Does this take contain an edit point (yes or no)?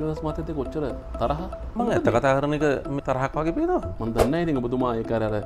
yes